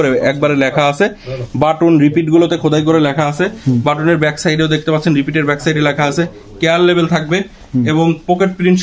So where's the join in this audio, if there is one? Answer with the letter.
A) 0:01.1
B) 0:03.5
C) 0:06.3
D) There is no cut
D